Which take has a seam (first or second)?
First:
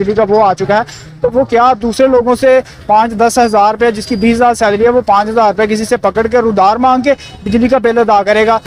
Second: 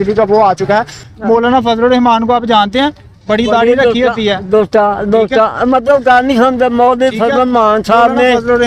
second